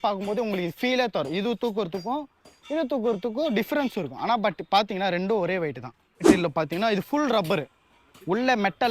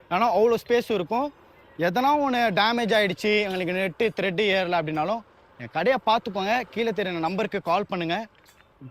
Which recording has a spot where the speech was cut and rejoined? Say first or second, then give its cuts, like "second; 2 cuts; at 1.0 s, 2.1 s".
first; 1 cut; at 6.2 s